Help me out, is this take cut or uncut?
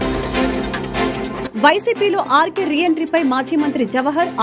uncut